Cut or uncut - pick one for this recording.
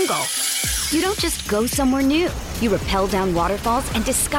uncut